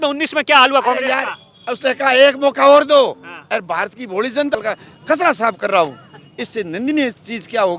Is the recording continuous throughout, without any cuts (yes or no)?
no